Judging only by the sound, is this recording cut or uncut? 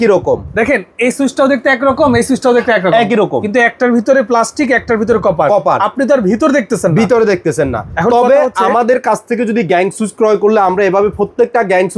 uncut